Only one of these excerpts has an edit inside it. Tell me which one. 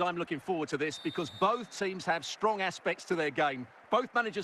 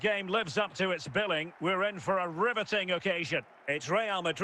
second; 1 cut; at 3.5 s

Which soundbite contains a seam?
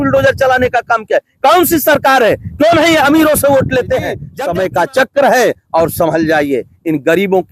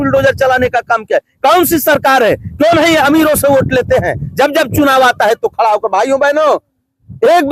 first; 1 cut; at 4.2 s

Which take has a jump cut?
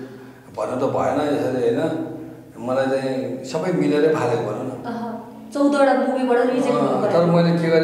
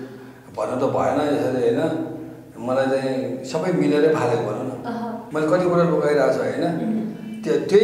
second; 1 cut; at 5.2 s

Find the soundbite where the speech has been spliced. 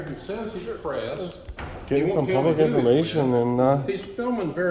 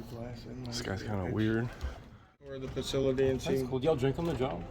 second; 1 cut; at 2.6 s

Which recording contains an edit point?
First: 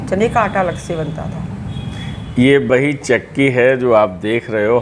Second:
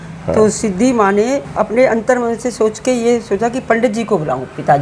second; 1 cut; at 1.5 s

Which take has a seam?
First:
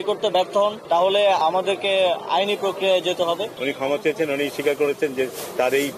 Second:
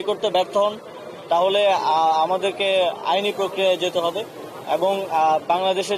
first; 2 cuts; at 1.4 s, 3.5 s

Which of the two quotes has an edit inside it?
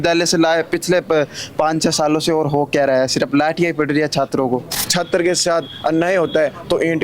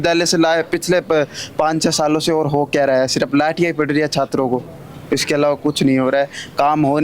first; 1 cut; at 4.8 s

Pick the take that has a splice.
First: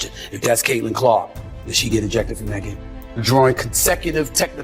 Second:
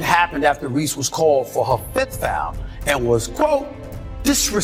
first; 1 cut; at 2.9 s

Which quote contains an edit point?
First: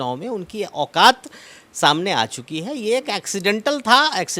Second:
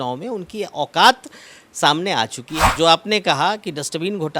second; 1 cut; at 2.7 s

